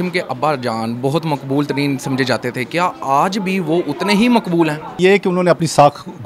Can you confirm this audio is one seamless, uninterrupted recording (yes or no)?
no